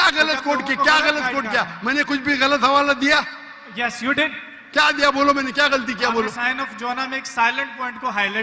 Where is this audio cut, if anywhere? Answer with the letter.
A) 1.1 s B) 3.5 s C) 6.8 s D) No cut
D